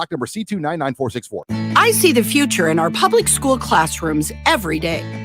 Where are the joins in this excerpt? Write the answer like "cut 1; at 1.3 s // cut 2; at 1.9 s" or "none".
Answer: cut 1; at 1.4 s